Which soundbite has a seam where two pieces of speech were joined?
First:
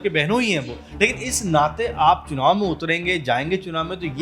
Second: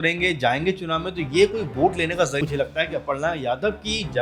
second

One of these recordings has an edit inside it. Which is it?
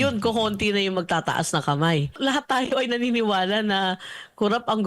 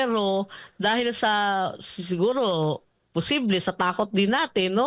first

